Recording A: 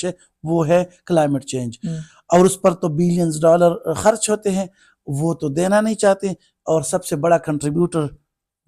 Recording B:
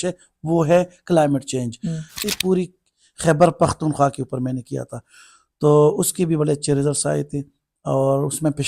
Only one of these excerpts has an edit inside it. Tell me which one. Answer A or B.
B